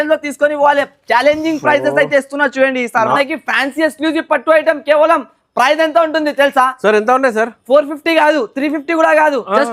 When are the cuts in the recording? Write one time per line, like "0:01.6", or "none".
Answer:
0:03.2